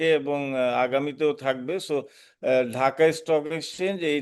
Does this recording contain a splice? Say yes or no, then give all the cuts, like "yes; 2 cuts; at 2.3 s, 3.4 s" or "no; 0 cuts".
no; 0 cuts